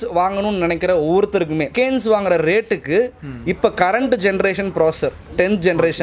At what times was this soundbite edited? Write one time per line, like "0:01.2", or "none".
0:01.7